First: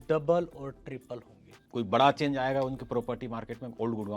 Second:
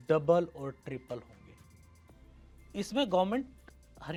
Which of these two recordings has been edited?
first; 1 cut; at 1.7 s

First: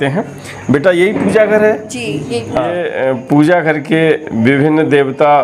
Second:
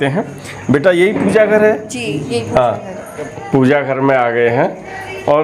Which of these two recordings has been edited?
first; 1 cut; at 2.9 s

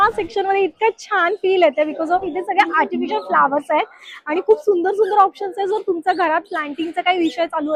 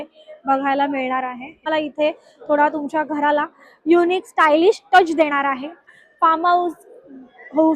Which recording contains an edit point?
second; 2 cuts; at 1.6 s, 5.9 s

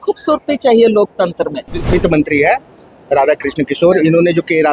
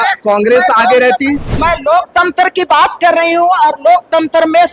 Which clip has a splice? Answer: first; 1 cut; at 1.9 s

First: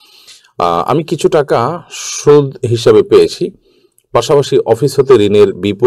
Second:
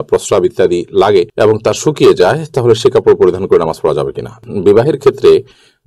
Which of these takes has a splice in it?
second; 1 cut; at 4.4 s

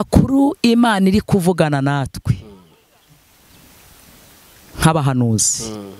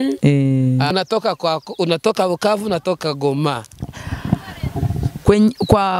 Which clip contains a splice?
second; 1 cut; at 0.9 s

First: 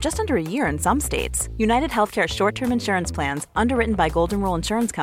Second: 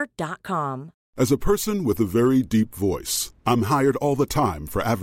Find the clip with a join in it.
second; 1 cut; at 1.0 s

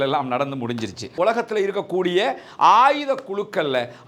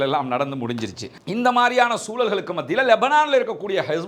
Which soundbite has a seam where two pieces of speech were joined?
first; 1 cut; at 1.1 s

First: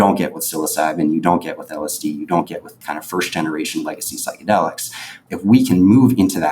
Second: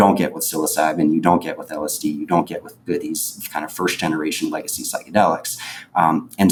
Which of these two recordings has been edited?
first; 2 cuts; at 2.7 s, 5.2 s

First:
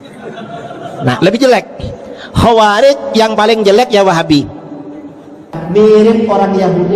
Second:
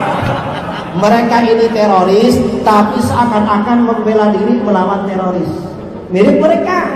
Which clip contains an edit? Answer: first; 1 cut; at 5.6 s

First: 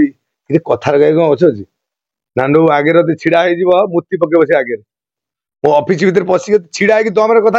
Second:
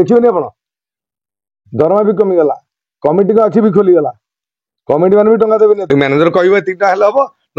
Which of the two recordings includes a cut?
second; 1 cut; at 5.9 s

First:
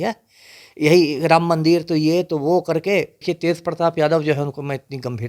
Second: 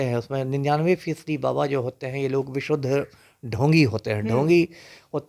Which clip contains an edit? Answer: first; 1 cut; at 3.1 s

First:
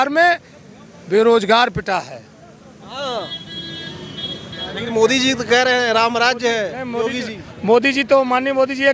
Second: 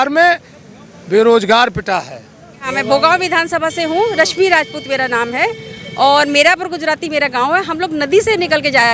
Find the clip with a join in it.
second; 1 cut; at 2.7 s

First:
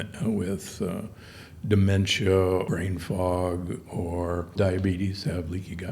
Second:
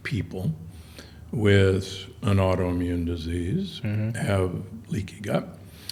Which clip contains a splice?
first; 2 cuts; at 2.7 s, 4.5 s

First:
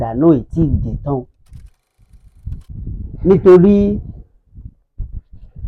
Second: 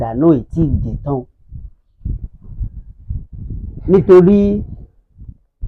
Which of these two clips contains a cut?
first; 1 cut; at 2.0 s

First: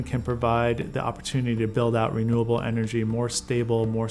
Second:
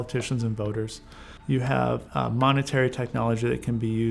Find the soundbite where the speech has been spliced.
second; 1 cut; at 2.1 s

